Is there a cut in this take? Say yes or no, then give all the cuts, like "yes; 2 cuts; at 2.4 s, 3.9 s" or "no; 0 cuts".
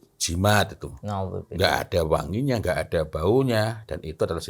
no; 0 cuts